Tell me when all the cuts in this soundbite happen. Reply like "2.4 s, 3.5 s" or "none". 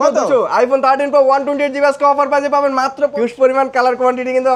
3.1 s